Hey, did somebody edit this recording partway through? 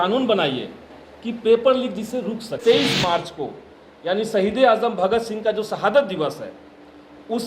yes; 1 cut; at 2.6 s

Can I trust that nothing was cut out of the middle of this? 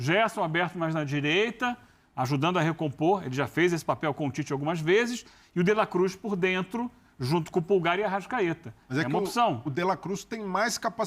yes; 0 cuts

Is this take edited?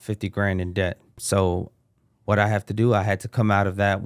yes; 1 cut; at 1.2 s

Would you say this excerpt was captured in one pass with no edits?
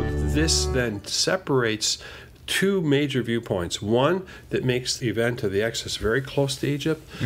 no; 1 cut; at 4.9 s

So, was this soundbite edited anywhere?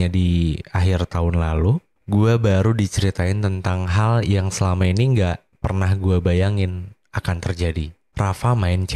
yes; 2 cuts; at 1.9 s, 8.0 s

